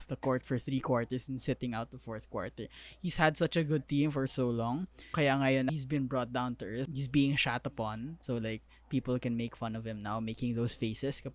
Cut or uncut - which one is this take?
cut